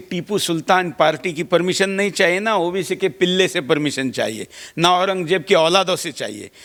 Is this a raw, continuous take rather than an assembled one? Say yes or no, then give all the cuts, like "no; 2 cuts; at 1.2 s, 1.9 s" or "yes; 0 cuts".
yes; 0 cuts